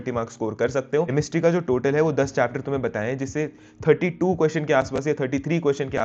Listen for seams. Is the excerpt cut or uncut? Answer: cut